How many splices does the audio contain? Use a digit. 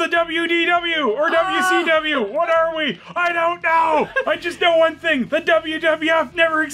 1